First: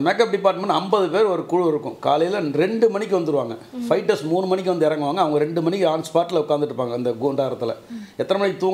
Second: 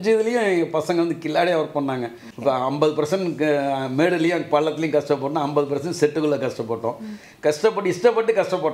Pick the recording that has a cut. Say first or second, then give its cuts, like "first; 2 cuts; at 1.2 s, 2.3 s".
second; 1 cut; at 2.2 s